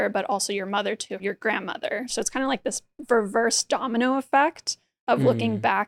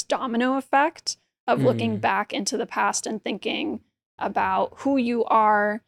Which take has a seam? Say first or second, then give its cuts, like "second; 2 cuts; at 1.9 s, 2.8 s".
first; 2 cuts; at 1.2 s, 2.1 s